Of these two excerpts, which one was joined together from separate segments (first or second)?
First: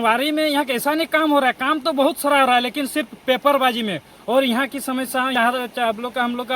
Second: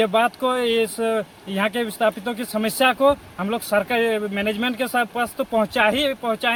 first